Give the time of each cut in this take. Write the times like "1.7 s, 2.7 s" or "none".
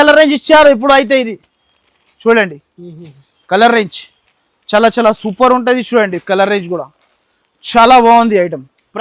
none